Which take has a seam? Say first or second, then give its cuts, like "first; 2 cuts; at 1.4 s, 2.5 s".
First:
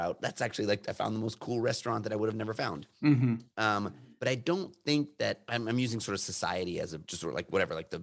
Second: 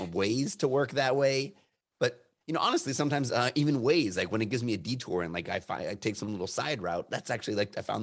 first; 3 cuts; at 4.0 s, 5.4 s, 7.1 s